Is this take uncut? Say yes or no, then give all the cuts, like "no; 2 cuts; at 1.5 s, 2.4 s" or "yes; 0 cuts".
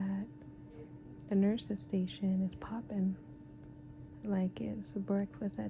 yes; 0 cuts